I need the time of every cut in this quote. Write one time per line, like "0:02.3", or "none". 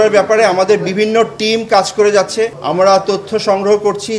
0:02.6